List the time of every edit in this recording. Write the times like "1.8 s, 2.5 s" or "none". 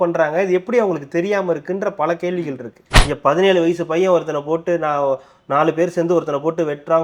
2.9 s